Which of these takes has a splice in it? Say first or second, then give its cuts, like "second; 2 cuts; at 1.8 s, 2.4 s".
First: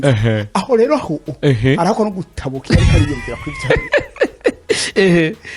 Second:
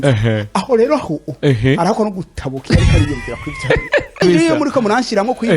second; 1 cut; at 4.2 s